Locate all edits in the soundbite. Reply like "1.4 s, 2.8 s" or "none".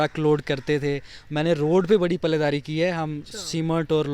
none